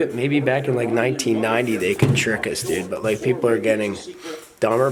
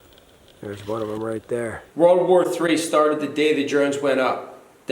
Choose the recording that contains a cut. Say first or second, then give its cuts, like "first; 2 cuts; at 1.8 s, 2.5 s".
second; 1 cut; at 1.8 s